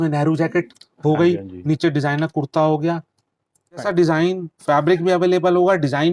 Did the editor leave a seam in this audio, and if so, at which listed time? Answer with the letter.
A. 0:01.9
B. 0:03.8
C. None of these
B